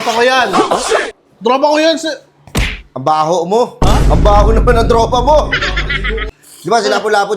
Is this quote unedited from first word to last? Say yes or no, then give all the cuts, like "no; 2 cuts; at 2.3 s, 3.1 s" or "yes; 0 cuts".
no; 1 cut; at 6.2 s